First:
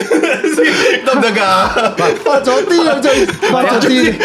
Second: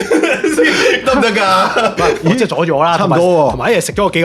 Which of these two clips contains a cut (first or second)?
second